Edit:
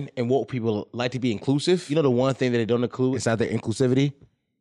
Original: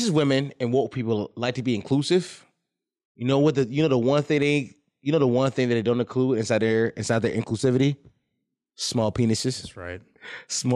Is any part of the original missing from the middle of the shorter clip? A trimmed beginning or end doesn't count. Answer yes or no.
yes